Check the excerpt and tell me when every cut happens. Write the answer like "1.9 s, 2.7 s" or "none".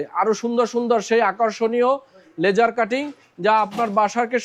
none